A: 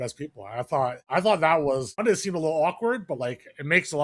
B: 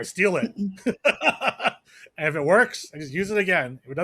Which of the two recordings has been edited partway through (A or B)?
A